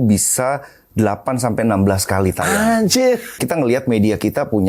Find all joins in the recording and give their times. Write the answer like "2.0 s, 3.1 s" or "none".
3.4 s